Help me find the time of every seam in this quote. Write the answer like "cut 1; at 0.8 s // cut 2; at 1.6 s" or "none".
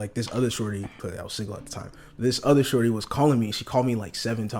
cut 1; at 0.9 s

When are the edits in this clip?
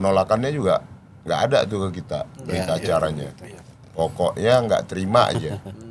none

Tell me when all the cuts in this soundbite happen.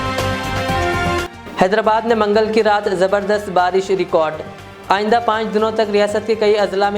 cut 1; at 1.0 s

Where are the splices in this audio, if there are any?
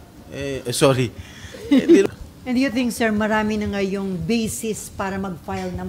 cut 1; at 2.0 s

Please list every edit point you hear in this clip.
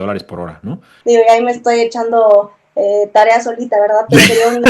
cut 1; at 1.0 s

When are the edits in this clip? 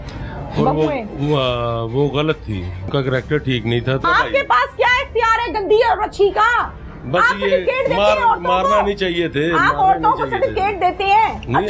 cut 1; at 2.9 s // cut 2; at 4.0 s

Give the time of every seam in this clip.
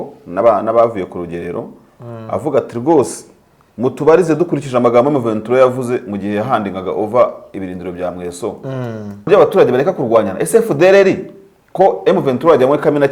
cut 1; at 9.3 s

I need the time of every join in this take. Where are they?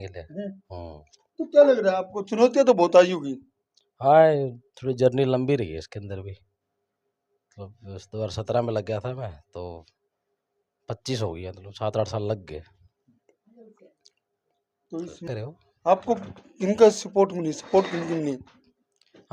cut 1; at 15.3 s

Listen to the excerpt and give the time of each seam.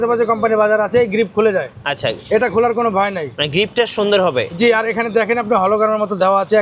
none

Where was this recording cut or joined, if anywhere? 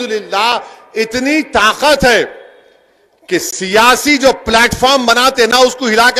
none

